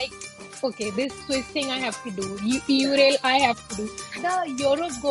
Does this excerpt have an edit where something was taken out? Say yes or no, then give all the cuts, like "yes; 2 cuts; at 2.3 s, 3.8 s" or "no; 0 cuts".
yes; 1 cut; at 4.2 s